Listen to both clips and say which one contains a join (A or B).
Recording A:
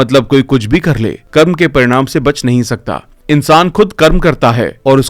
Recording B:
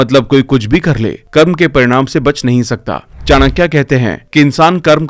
B